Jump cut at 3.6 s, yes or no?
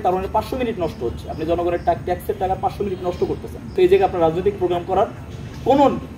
yes